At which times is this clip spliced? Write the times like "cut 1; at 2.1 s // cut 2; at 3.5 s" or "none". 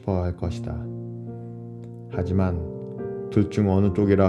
cut 1; at 0.9 s // cut 2; at 2.2 s

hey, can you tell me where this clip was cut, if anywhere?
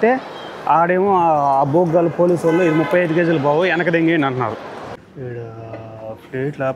cut 1; at 5.0 s

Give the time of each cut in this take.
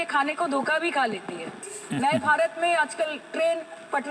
cut 1; at 1.8 s

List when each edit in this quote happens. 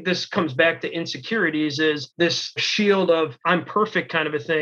cut 1; at 2.5 s // cut 2; at 3.4 s

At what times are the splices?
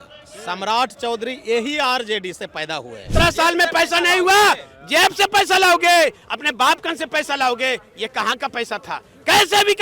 cut 1; at 3.1 s

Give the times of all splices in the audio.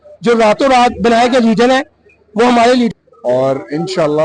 cut 1; at 2.9 s

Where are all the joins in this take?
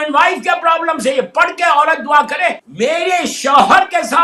cut 1; at 2.7 s

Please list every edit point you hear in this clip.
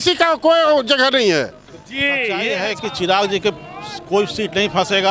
cut 1; at 2.4 s

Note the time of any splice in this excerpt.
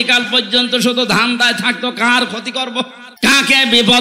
cut 1; at 3.0 s

